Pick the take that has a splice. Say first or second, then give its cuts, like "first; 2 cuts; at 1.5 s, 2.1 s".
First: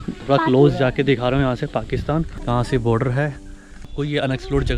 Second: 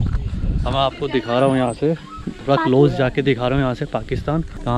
first; 1 cut; at 3.9 s